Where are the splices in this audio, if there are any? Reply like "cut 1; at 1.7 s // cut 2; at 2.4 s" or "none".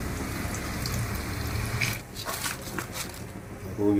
none